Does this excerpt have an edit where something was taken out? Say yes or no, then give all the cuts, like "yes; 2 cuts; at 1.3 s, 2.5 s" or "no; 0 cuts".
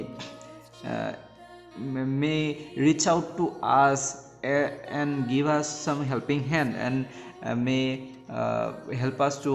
no; 0 cuts